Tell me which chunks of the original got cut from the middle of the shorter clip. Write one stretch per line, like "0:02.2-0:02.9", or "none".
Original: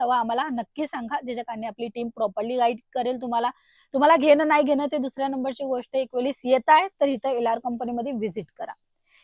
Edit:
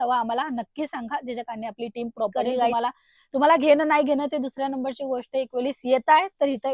0:02.7-0:03.3